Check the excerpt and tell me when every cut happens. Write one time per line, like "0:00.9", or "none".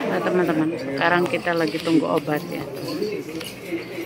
none